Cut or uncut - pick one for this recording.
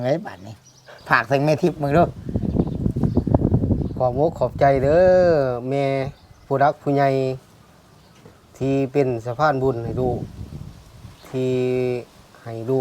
cut